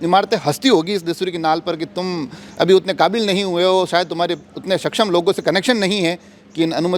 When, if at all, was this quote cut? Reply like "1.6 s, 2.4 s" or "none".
none